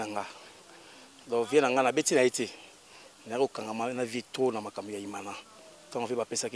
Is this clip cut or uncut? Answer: uncut